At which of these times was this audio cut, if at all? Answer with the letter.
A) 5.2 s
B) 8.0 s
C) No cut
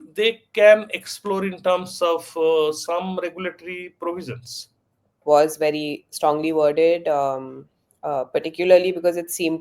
A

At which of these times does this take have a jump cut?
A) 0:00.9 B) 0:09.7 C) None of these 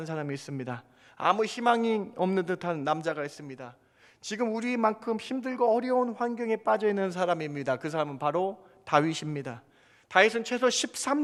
C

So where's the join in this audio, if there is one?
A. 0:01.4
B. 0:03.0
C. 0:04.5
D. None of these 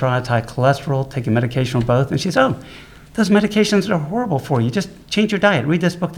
D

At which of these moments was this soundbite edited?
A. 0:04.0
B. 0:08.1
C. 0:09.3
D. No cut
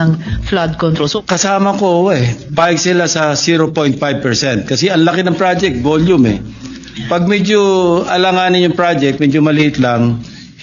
D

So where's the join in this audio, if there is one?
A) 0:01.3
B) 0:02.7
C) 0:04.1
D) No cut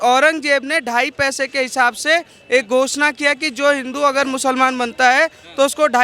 D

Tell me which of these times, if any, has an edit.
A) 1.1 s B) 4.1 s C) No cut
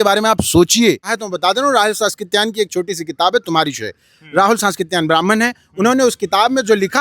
A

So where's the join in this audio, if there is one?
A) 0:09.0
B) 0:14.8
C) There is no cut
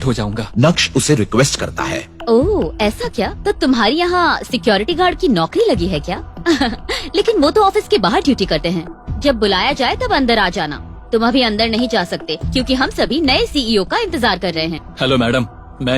B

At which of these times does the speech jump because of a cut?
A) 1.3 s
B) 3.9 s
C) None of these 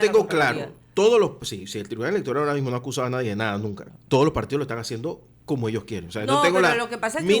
B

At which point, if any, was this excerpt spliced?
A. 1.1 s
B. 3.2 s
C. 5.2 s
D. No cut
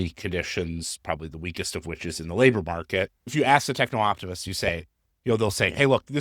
B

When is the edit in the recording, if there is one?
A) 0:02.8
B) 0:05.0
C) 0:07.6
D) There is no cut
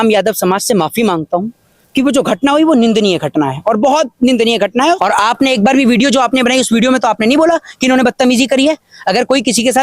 B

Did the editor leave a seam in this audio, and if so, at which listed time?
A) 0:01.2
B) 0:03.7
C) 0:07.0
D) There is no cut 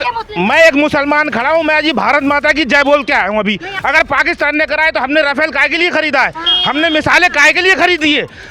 B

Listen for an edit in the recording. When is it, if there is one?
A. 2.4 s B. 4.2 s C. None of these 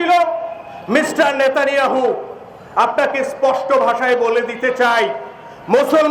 C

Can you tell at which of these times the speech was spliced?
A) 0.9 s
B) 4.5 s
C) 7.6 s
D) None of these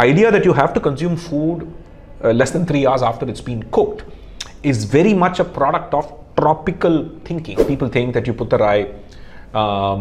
C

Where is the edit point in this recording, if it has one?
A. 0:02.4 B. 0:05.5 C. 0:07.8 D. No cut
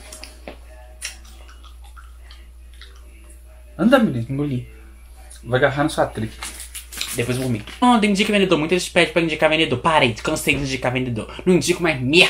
C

